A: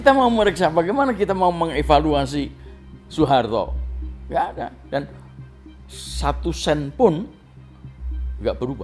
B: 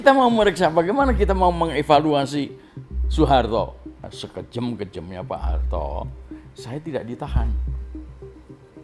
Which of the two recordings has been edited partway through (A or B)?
B